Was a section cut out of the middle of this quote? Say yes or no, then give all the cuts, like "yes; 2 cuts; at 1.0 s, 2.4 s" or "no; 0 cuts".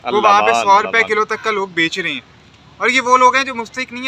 no; 0 cuts